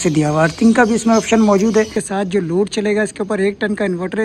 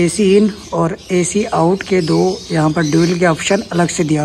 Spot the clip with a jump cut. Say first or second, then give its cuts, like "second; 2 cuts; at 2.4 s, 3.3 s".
first; 1 cut; at 1.9 s